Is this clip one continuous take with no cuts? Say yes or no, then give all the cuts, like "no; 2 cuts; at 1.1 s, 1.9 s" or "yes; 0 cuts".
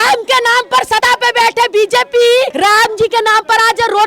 no; 2 cuts; at 1.0 s, 2.5 s